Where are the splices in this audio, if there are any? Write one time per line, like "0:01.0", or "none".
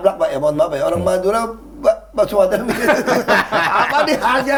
none